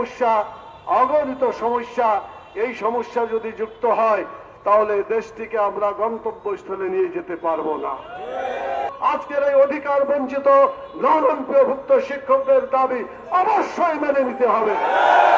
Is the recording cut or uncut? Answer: uncut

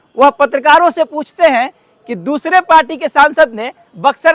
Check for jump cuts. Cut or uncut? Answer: uncut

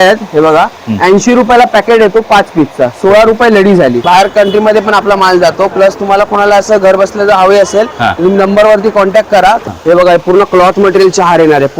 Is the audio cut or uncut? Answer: cut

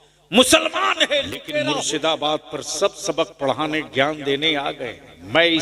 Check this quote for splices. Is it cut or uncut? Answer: cut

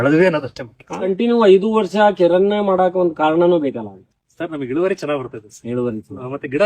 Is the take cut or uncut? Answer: cut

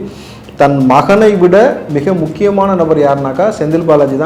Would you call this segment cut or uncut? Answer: uncut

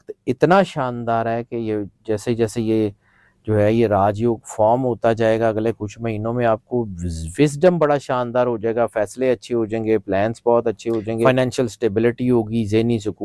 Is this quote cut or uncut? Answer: cut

